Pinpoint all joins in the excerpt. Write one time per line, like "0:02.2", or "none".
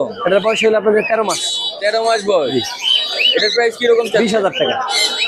none